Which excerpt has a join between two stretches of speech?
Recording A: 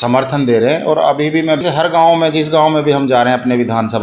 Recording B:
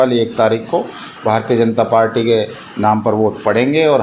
A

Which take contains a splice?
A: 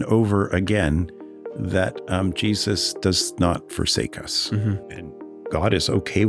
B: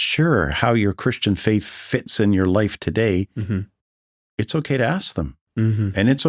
A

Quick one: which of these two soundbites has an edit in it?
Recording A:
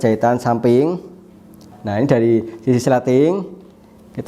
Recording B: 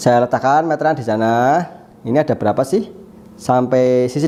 A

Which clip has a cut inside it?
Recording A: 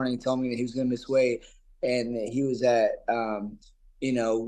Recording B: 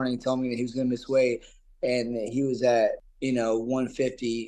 B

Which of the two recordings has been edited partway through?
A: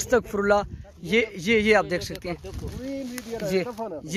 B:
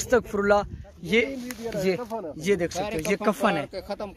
B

